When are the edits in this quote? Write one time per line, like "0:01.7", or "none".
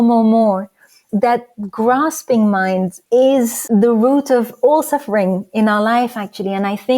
0:01.0
0:03.0
0:03.6

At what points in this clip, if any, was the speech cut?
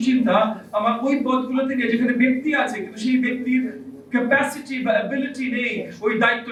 none

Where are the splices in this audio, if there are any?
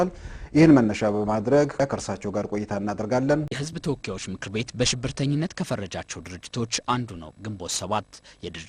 0:03.6

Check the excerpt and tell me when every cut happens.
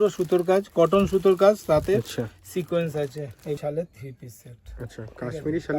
0:03.6

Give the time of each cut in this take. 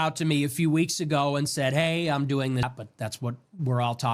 0:02.6

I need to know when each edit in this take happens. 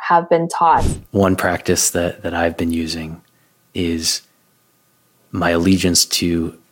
0:00.9

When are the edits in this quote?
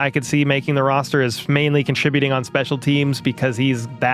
none

